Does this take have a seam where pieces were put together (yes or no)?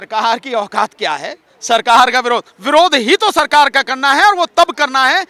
no